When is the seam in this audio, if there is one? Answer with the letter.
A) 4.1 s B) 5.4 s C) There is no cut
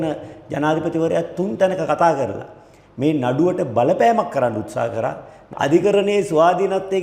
B